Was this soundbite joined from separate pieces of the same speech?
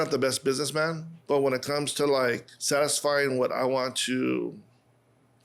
yes; 2 cuts; at 1.1 s, 2.5 s

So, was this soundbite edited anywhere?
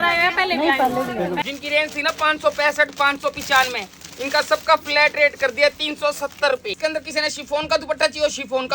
yes; 2 cuts; at 1.4 s, 6.8 s

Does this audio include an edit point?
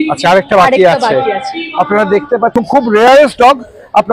yes; 1 cut; at 2.5 s

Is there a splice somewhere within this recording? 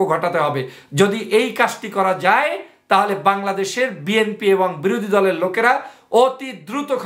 no; 0 cuts

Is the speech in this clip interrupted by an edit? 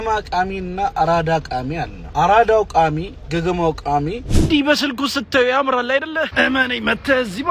yes; 3 cuts; at 2.0 s, 3.1 s, 4.2 s

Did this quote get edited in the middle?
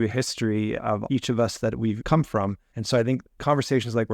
yes; 3 cuts; at 0.9 s, 2.2 s, 3.3 s

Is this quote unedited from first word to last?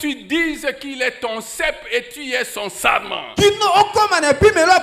yes; 0 cuts

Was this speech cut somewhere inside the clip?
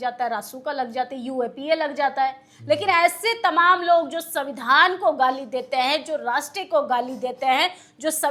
no; 0 cuts

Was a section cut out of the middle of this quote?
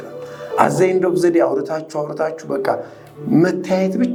no; 0 cuts

